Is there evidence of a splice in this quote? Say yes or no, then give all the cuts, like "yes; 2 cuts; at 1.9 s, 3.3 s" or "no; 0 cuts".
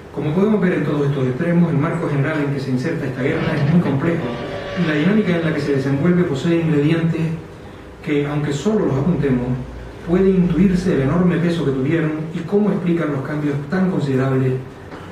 no; 0 cuts